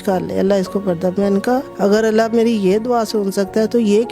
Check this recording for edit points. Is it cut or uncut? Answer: cut